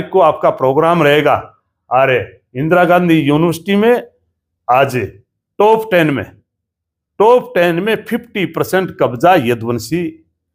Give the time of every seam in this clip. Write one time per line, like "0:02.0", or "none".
none